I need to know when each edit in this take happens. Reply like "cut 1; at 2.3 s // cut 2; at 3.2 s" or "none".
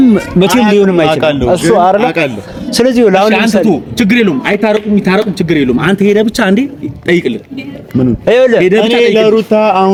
none